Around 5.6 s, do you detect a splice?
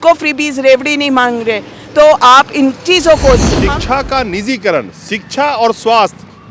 no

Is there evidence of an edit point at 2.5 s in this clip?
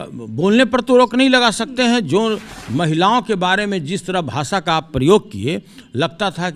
yes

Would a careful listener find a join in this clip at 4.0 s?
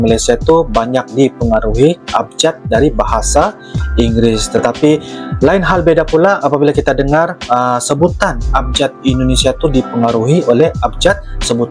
no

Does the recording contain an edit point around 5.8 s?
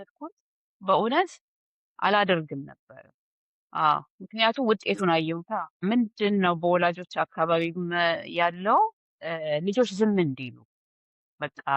yes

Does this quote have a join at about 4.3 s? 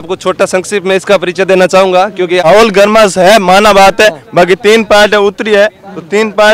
no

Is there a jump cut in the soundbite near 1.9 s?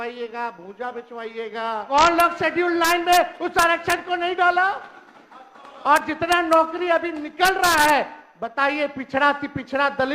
yes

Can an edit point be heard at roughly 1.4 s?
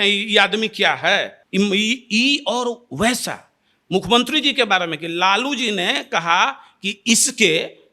no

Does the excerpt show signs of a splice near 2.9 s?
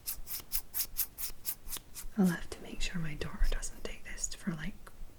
no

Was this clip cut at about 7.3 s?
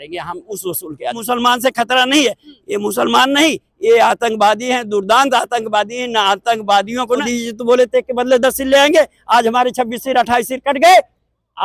yes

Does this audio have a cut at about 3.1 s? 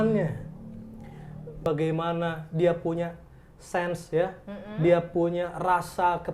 no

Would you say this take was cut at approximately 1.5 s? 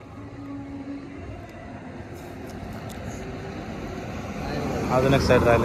no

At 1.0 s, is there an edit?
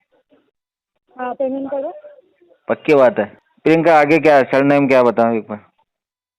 no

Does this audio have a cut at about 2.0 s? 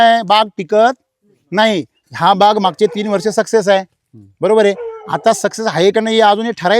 yes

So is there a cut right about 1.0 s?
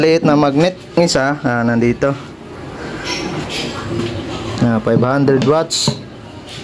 yes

